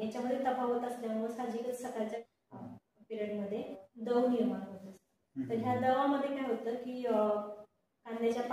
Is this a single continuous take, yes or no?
no